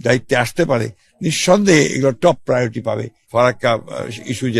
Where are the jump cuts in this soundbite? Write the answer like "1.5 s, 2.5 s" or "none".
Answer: 3.1 s